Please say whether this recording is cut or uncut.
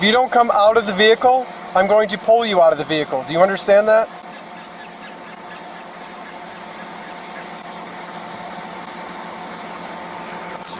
uncut